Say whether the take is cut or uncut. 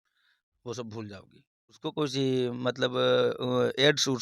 cut